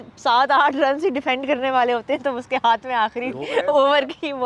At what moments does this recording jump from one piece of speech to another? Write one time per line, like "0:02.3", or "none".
none